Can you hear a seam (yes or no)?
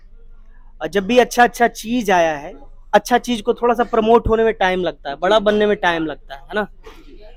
no